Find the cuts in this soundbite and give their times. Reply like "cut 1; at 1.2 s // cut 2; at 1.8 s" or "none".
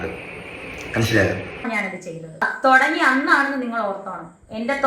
cut 1; at 1.7 s

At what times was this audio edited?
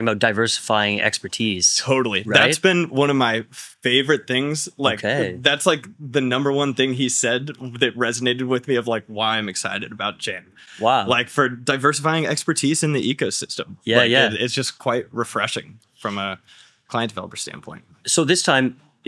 none

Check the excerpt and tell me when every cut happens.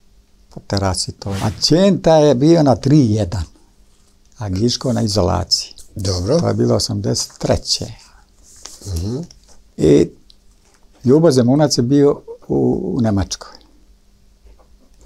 cut 1; at 1.4 s

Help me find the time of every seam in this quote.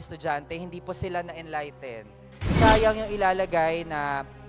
cut 1; at 2.4 s

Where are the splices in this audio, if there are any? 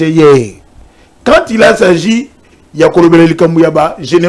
none

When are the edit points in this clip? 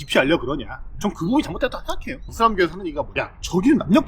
cut 1; at 1.0 s // cut 2; at 2.3 s

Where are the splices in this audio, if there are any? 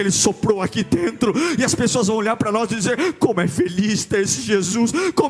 none

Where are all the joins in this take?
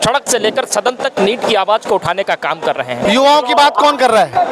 cut 1; at 3.0 s

